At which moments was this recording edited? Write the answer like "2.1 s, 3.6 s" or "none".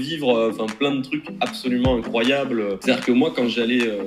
2.8 s

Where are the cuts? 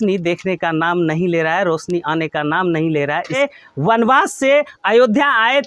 3.4 s

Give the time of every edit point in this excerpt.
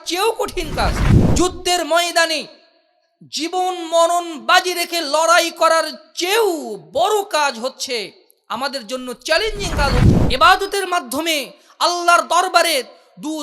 10.1 s

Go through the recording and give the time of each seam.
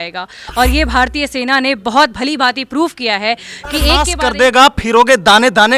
4.1 s

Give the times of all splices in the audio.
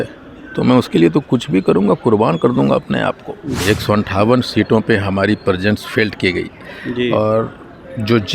3.6 s

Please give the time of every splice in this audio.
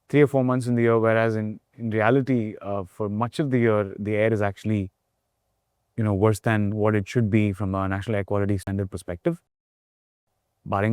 none

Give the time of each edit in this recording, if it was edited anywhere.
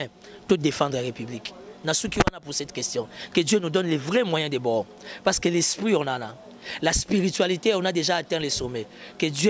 none

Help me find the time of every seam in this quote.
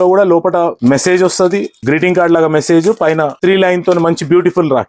0.8 s, 1.7 s, 3.3 s

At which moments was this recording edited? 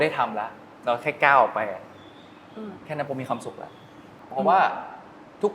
4.1 s

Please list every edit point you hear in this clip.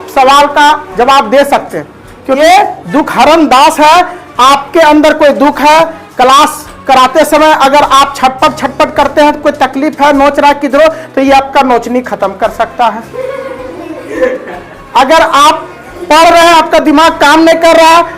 2.4 s

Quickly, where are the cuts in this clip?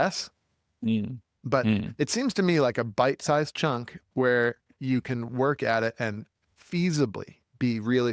none

